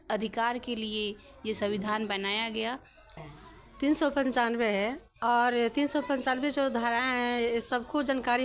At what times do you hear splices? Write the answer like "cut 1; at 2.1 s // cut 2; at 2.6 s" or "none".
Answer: cut 1; at 3.2 s